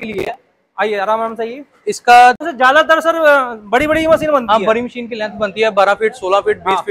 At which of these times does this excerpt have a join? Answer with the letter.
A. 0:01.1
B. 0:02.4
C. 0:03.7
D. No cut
B